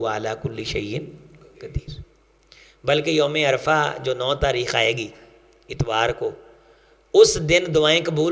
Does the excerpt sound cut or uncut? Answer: uncut